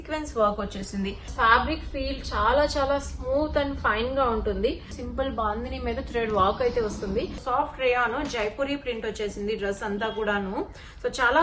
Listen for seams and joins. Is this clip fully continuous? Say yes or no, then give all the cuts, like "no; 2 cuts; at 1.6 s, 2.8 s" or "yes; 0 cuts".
no; 3 cuts; at 1.3 s, 4.9 s, 7.4 s